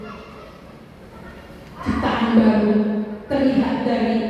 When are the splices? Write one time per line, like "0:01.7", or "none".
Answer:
none